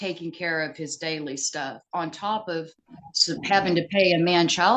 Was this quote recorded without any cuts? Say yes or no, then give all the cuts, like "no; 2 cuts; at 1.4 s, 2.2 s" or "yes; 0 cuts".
yes; 0 cuts